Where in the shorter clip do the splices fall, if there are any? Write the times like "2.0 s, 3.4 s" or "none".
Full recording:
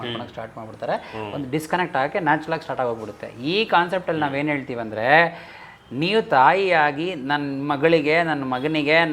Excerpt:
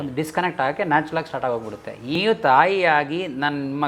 2.1 s